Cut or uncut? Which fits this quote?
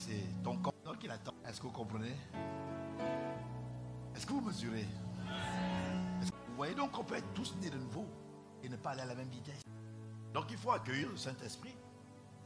uncut